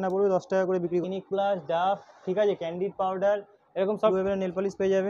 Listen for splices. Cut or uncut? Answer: cut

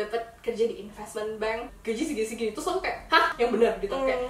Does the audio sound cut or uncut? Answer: cut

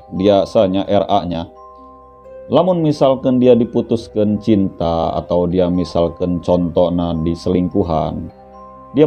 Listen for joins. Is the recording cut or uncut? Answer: uncut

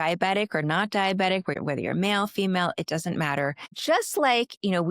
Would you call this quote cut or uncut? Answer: cut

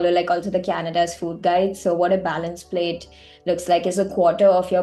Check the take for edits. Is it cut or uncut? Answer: uncut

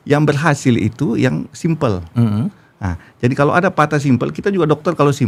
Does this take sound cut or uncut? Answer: uncut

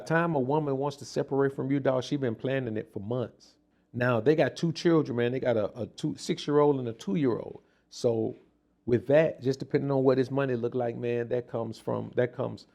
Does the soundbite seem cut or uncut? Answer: uncut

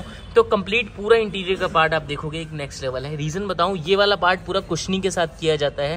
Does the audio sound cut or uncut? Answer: uncut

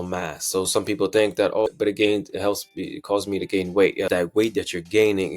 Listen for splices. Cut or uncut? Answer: cut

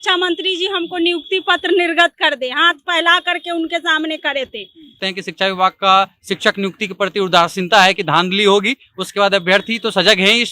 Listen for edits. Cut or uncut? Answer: cut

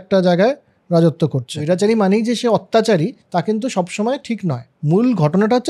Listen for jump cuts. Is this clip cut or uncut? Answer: cut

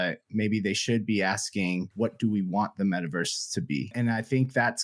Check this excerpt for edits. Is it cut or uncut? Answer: cut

